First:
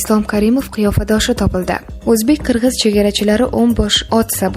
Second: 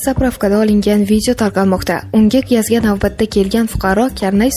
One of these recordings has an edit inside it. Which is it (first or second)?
first